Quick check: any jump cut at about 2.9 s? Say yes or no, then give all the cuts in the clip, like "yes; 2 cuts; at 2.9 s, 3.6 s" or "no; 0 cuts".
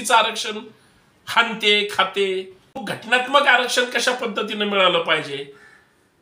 yes; 1 cut; at 2.9 s